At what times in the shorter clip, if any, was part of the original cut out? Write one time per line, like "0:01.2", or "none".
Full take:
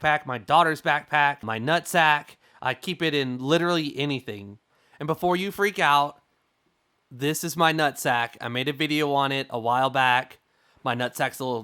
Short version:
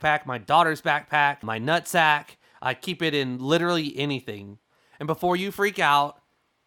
none